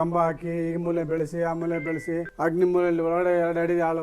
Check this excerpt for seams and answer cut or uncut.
cut